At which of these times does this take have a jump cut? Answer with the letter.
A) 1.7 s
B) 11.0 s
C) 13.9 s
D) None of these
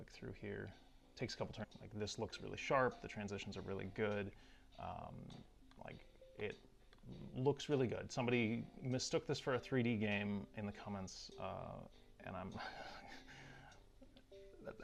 D